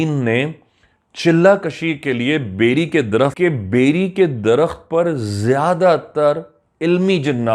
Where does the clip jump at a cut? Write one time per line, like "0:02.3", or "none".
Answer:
0:03.3

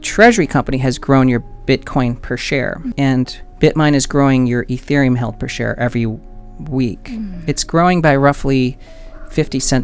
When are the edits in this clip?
none

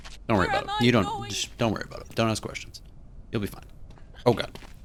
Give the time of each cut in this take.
none

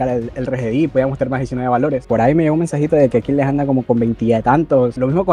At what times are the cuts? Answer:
none

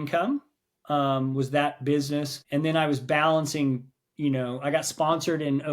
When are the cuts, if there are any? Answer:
0:02.4

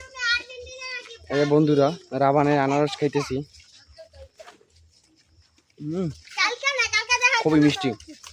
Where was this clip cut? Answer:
none

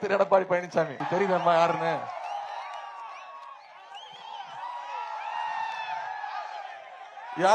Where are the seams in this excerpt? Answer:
0:01.0

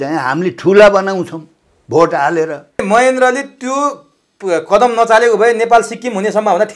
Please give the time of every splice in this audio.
0:02.8

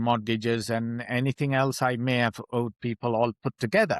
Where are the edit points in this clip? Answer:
0:02.4

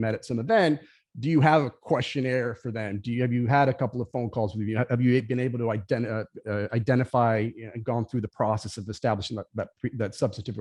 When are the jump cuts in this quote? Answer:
none

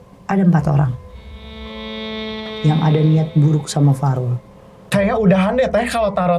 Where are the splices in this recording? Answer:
0:04.9

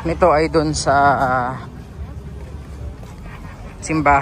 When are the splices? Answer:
none

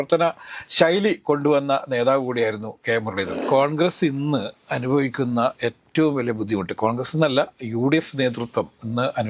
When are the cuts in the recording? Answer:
0:03.3

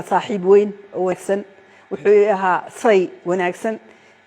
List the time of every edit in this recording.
0:01.1

